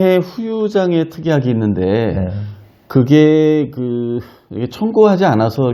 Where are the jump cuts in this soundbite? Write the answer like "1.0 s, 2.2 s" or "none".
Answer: none